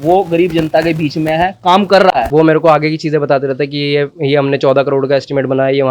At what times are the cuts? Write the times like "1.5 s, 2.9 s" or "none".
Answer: 2.3 s